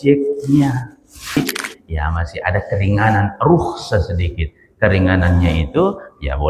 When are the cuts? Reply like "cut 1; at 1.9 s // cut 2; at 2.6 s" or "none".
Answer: cut 1; at 1.4 s